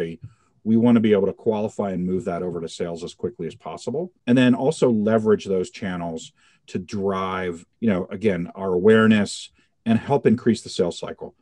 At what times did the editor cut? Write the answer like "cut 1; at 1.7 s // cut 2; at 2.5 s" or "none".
none